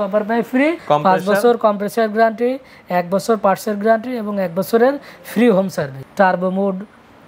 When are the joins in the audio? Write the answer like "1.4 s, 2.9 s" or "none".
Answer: 0.8 s, 6.0 s